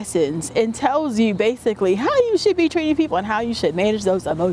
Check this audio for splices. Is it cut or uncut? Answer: uncut